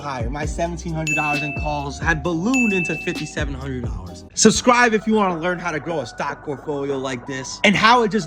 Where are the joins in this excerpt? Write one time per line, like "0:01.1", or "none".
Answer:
0:04.2